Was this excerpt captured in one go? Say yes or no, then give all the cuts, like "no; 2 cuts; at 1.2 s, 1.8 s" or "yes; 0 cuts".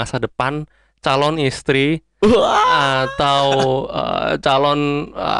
yes; 0 cuts